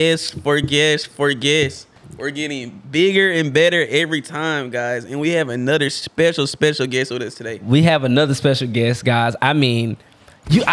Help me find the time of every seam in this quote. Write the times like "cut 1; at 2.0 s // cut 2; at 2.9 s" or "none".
none